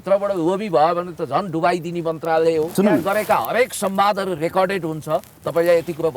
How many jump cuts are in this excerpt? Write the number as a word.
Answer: one